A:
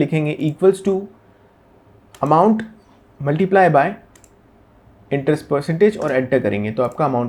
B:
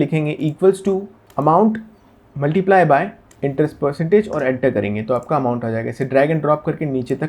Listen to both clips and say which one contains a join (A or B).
B